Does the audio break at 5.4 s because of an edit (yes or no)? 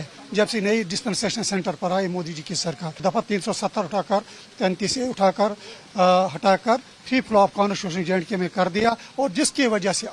no